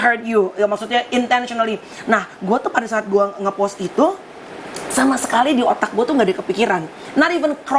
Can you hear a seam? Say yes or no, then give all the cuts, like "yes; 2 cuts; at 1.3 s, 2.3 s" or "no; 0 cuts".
no; 0 cuts